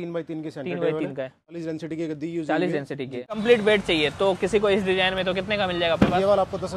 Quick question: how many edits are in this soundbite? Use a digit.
2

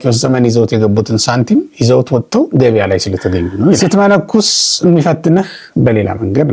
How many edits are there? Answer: 1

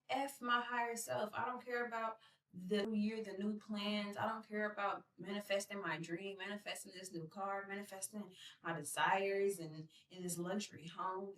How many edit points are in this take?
1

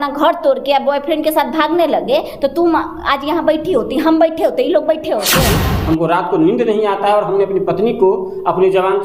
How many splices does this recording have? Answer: 1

